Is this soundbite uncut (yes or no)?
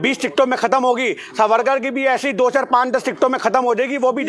yes